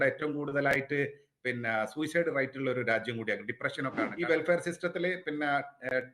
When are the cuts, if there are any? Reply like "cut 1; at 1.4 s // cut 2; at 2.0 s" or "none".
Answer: cut 1; at 4.1 s